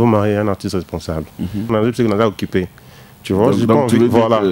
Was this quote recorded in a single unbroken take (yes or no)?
no